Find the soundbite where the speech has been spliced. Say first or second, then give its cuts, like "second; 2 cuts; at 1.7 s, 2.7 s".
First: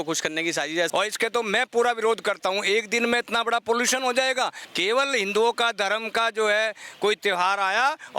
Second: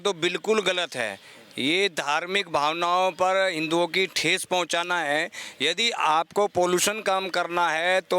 first; 2 cuts; at 0.9 s, 4.6 s